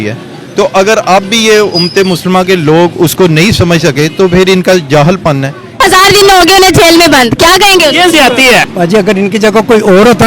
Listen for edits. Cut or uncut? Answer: cut